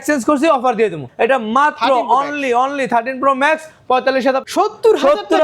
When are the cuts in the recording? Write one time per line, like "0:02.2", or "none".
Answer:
0:01.0
0:04.4